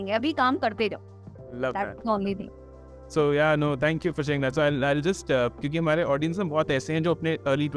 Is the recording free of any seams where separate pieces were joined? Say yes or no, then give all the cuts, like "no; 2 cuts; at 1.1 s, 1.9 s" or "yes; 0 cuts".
yes; 0 cuts